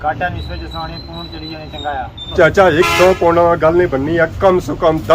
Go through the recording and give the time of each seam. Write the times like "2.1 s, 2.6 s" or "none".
2.2 s